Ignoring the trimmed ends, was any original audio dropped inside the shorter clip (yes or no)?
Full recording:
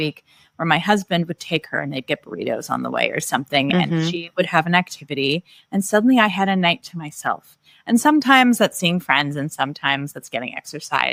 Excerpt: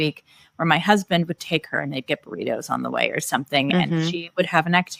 no